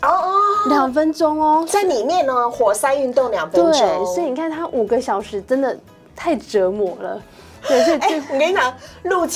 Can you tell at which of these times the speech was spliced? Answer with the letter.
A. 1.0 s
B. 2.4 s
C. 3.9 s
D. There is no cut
D